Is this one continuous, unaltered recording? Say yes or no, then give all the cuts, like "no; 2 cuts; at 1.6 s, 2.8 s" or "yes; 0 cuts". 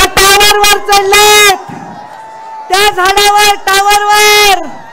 yes; 0 cuts